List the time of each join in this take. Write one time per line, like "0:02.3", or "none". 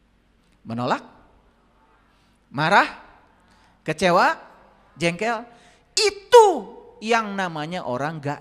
none

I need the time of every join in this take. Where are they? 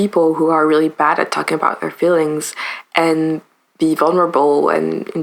none

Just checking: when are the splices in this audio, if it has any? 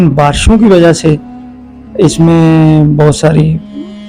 none

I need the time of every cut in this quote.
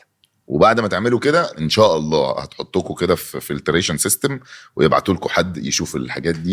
0:01.5

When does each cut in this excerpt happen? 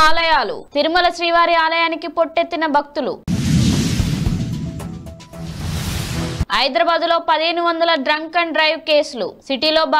0:03.2
0:06.4

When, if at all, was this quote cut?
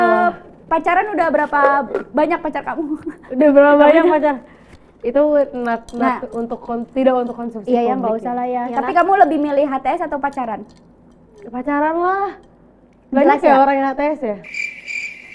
none

